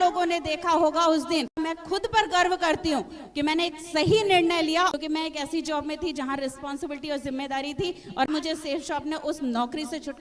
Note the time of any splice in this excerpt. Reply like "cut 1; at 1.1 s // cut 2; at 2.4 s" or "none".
cut 1; at 1.5 s // cut 2; at 4.9 s // cut 3; at 8.3 s